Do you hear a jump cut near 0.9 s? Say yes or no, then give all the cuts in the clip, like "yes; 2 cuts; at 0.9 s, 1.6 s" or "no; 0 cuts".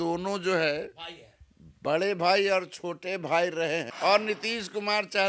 no; 1 cut; at 3.9 s